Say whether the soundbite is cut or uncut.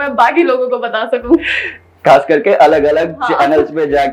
uncut